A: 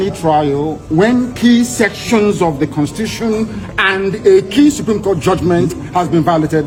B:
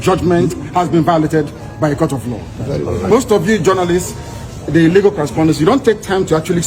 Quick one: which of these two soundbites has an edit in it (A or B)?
B